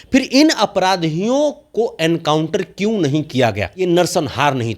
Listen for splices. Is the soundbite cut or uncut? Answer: cut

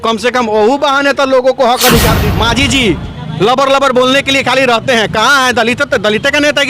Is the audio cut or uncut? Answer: cut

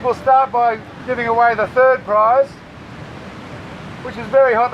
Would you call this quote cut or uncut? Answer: cut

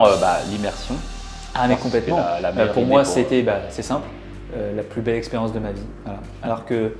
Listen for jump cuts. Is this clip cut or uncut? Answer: uncut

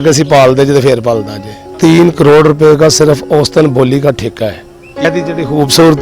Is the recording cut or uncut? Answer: cut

